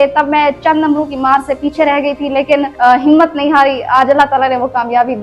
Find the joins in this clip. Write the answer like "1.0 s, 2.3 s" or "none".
2.7 s